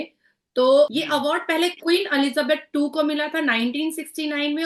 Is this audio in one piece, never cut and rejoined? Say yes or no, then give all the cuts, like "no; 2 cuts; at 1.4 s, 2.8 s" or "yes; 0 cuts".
no; 1 cut; at 0.9 s